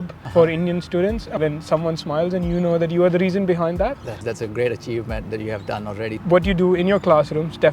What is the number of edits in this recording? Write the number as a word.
three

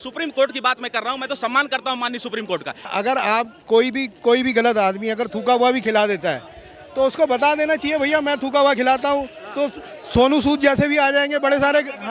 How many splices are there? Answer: one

